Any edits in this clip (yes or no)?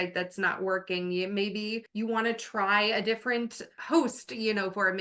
yes